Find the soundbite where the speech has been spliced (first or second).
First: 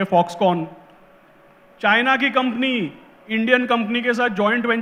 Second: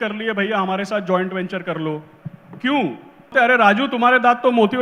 second